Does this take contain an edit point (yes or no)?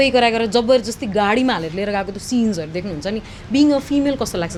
no